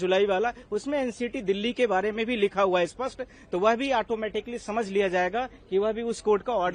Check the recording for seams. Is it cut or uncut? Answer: uncut